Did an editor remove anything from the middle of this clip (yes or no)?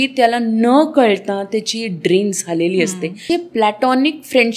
yes